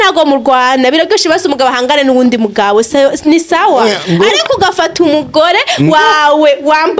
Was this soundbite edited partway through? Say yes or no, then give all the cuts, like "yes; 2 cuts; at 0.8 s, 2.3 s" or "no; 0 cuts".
no; 0 cuts